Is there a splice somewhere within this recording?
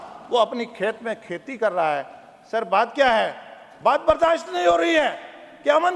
no; 0 cuts

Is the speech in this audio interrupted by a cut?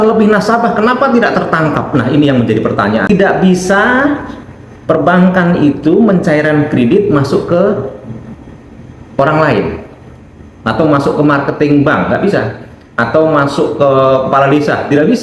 yes; 1 cut; at 3.1 s

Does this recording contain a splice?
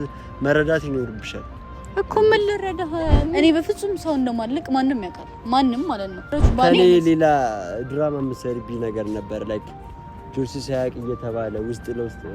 yes; 2 cuts; at 3.4 s, 6.4 s

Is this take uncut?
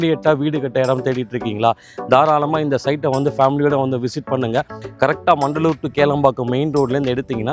no; 1 cut; at 4.7 s

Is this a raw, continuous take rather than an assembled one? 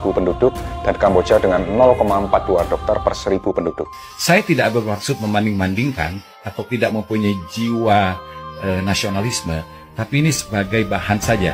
no; 1 cut; at 3.9 s

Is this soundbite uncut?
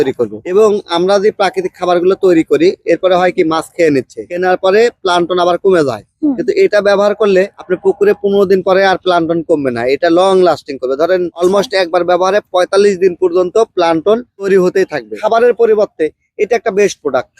no; 2 cuts; at 4.3 s, 15.1 s

